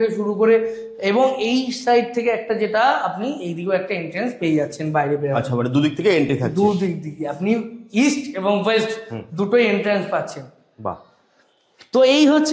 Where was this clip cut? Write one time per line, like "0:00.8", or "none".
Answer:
none